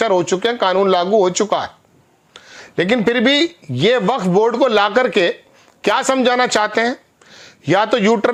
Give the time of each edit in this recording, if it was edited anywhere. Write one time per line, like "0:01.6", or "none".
none